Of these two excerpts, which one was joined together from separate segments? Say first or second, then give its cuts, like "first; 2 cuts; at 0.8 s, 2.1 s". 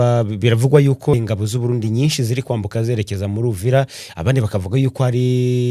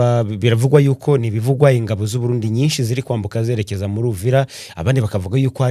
first; 1 cut; at 1.1 s